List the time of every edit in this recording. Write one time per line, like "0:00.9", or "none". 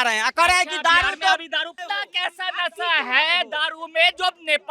0:01.7

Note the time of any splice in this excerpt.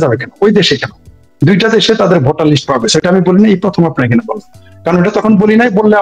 none

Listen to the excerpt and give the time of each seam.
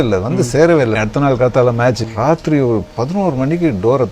0:01.0
0:02.0

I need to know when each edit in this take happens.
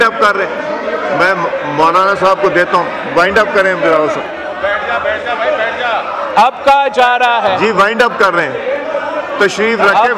none

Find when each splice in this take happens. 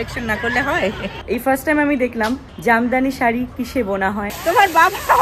0:01.1
0:02.5
0:04.3

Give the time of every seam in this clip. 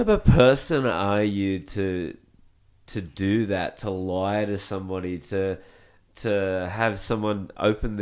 none

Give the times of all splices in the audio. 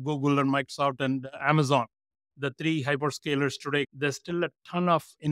none

